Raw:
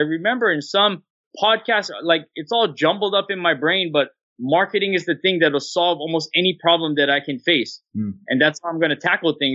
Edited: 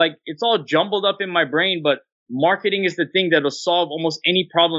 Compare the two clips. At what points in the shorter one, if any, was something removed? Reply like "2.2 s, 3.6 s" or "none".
none